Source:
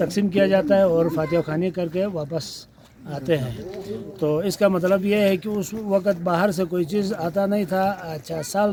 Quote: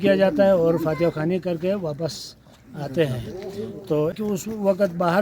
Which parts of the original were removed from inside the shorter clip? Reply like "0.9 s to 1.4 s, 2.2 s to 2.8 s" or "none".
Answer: 4.5 s to 5.4 s